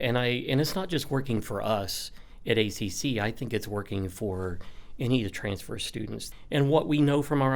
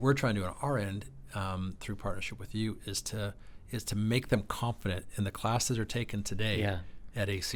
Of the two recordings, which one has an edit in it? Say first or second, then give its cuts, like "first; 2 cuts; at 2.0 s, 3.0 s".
first; 1 cut; at 6.3 s